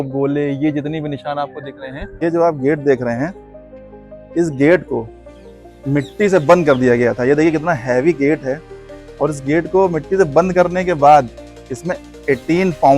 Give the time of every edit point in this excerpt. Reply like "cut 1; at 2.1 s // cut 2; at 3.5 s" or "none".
cut 1; at 2.2 s